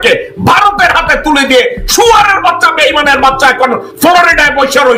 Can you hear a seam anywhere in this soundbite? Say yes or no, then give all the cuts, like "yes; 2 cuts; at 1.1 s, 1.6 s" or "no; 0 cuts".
no; 0 cuts